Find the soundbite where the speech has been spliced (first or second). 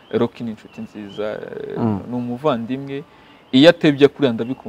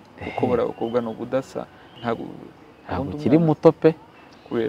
second